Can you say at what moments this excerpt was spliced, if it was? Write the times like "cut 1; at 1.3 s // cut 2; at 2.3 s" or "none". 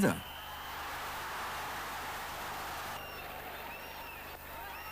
cut 1; at 3.0 s